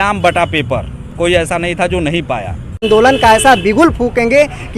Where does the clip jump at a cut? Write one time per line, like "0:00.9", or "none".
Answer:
0:02.8